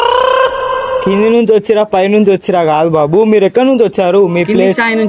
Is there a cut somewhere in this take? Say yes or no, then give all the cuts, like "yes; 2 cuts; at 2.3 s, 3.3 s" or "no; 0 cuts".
yes; 1 cut; at 1.0 s